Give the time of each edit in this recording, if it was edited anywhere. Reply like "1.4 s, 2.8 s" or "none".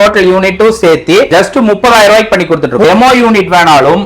2.8 s